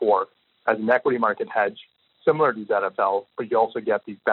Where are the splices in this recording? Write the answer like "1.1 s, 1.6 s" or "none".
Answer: 2.2 s